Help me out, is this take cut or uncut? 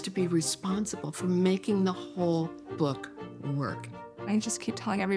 cut